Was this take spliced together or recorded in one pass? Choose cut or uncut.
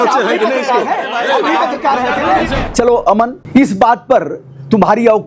cut